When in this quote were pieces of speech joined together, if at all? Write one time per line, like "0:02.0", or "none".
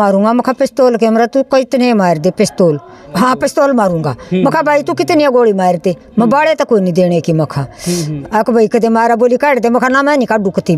0:03.0
0:08.1